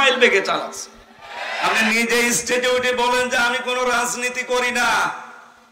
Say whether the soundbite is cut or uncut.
cut